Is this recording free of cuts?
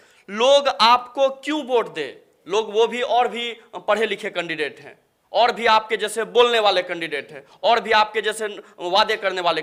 yes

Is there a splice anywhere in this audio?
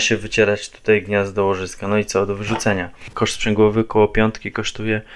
yes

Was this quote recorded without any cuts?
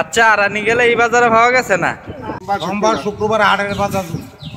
no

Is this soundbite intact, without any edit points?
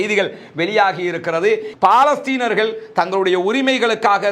no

